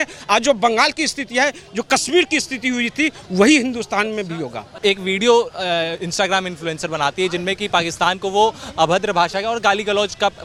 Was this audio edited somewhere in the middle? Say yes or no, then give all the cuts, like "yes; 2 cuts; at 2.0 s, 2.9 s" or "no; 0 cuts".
no; 0 cuts